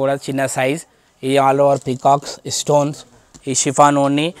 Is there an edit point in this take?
no; 0 cuts

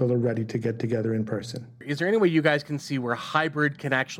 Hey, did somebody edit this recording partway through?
yes; 1 cut; at 1.8 s

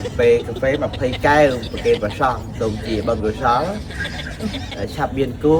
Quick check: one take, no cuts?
yes; 0 cuts

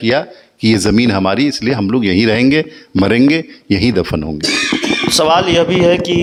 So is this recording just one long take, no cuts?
yes; 0 cuts

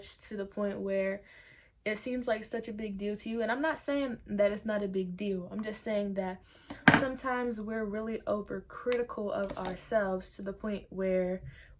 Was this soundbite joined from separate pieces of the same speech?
no; 0 cuts

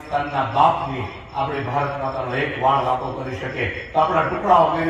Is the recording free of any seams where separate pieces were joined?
yes; 0 cuts

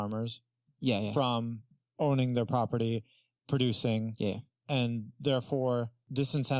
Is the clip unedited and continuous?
yes; 0 cuts

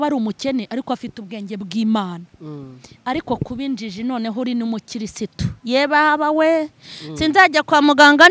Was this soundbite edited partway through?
no; 0 cuts

